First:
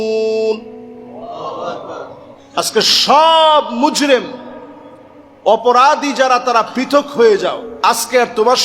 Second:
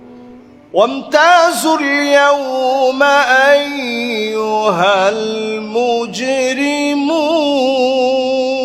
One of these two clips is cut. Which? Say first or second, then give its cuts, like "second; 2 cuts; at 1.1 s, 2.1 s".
first; 1 cut; at 7.7 s